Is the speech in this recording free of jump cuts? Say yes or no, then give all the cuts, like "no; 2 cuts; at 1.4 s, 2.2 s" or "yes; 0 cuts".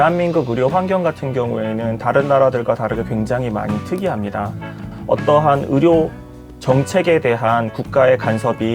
no; 1 cut; at 4.8 s